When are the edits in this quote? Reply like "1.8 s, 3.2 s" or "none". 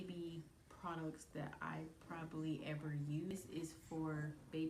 3.3 s